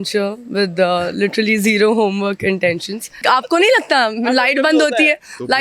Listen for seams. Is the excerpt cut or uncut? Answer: cut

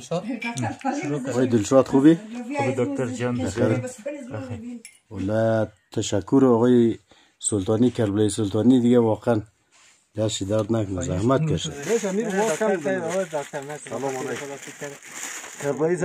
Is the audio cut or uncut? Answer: cut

